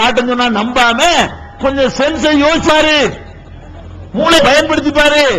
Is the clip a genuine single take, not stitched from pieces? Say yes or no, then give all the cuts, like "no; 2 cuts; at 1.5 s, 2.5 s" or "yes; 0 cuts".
no; 2 cuts; at 2.7 s, 4.4 s